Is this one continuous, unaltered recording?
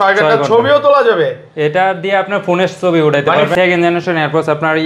no; 1 cut; at 3.5 s

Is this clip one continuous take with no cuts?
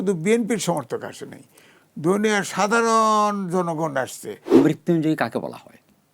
no; 1 cut; at 4.5 s

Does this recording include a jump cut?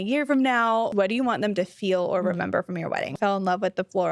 yes; 2 cuts; at 0.9 s, 3.1 s

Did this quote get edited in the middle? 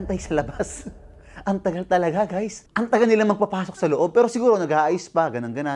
yes; 1 cut; at 2.6 s

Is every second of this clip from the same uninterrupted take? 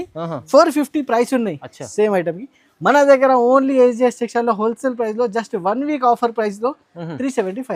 yes; 0 cuts

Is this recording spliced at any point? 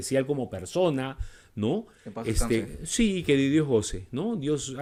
no; 0 cuts

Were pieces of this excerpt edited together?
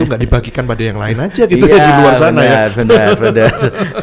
no; 0 cuts

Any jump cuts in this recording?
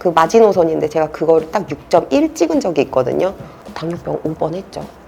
no; 0 cuts

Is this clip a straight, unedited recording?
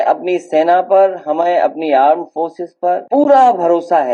no; 1 cut; at 3.0 s

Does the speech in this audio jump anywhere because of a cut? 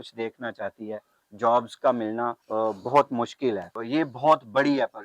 yes; 3 cuts; at 1.1 s, 2.4 s, 3.7 s

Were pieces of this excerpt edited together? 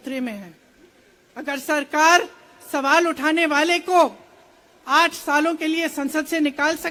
no; 0 cuts

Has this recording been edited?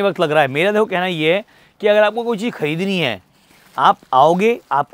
no; 0 cuts

